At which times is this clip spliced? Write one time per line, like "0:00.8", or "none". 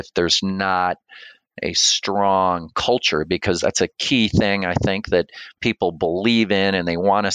0:03.6